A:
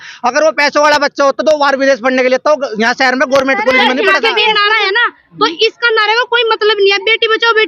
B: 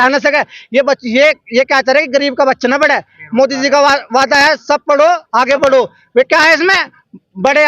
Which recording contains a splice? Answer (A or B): A